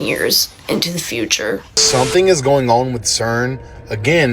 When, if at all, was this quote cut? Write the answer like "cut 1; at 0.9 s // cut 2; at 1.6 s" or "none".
cut 1; at 1.7 s

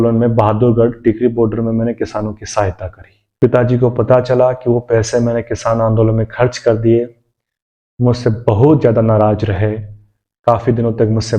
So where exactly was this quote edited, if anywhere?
cut 1; at 3.4 s

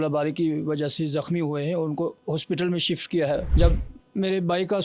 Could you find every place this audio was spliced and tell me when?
cut 1; at 3.5 s

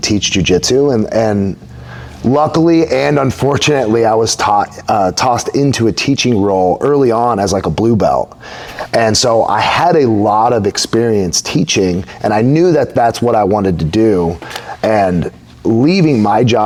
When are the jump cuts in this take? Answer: none

